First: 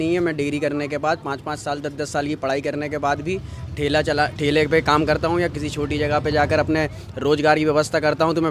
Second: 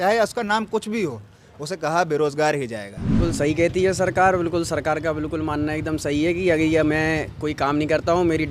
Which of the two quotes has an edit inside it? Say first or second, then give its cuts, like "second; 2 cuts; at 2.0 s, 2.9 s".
second; 1 cut; at 3.2 s